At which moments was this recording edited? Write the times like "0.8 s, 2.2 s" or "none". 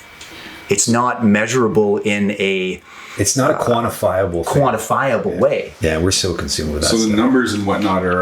5.7 s